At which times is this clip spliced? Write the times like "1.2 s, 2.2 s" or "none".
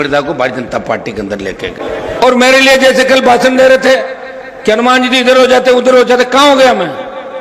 1.8 s